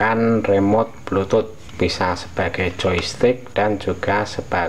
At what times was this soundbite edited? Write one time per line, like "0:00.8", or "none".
0:01.6